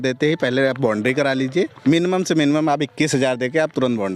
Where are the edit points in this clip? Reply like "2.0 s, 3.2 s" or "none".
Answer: 1.7 s